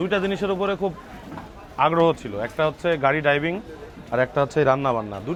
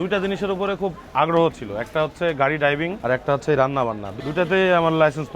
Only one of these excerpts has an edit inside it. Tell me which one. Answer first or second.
second